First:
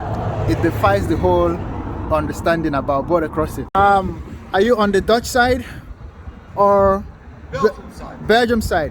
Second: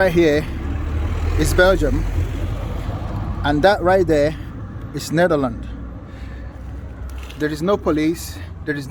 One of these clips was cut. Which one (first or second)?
first